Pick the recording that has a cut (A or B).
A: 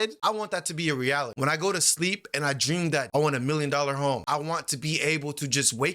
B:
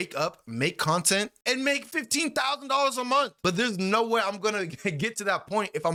A